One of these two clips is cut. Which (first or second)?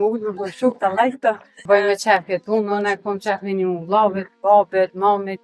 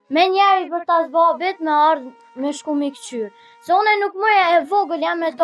first